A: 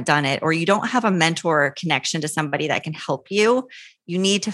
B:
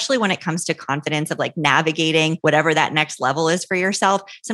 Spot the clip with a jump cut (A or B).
B